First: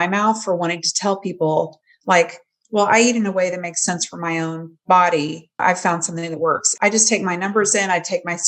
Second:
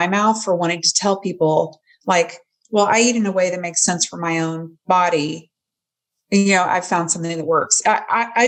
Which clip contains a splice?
first; 2 cuts; at 5.6 s, 6.7 s

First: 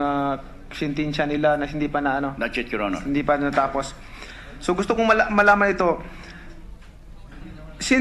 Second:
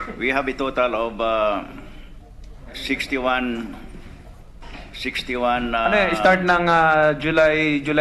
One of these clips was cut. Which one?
second; 1 cut; at 1.5 s

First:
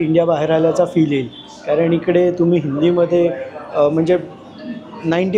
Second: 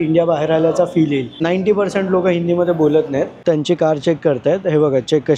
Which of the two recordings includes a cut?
second; 2 cuts; at 1.3 s, 3.3 s

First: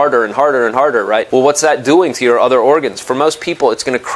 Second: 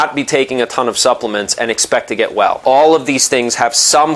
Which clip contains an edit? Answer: first; 1 cut; at 1.3 s

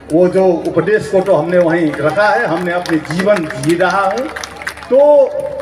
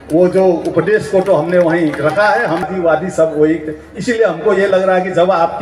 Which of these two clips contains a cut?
second; 1 cut; at 2.7 s

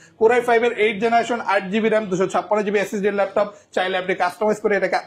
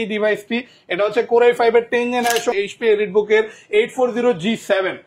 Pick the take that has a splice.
second; 1 cut; at 2.5 s

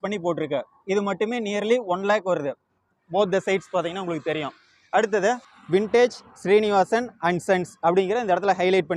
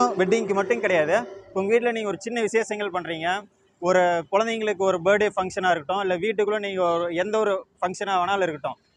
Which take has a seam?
first; 1 cut; at 5.5 s

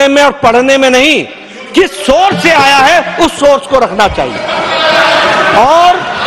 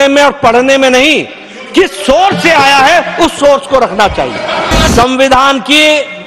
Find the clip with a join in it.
second; 1 cut; at 4.9 s

